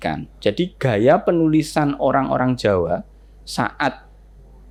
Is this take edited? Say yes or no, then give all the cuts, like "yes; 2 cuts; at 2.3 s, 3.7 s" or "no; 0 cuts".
no; 0 cuts